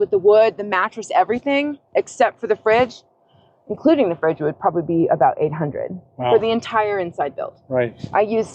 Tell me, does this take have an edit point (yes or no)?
no